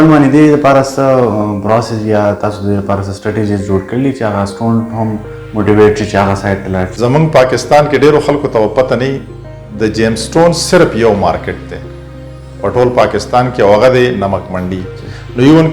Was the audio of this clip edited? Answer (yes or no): yes